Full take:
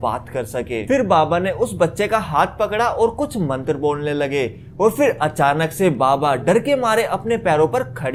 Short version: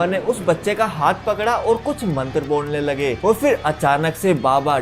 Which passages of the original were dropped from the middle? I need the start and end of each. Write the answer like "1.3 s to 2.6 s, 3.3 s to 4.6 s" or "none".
4.5 s to 4.7 s